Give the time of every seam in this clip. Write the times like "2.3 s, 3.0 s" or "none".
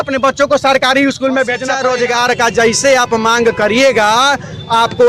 1.7 s